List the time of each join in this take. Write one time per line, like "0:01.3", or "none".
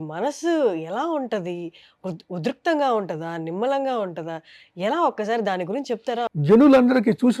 0:06.3